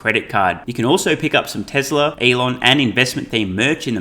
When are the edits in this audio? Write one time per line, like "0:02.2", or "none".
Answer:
0:02.2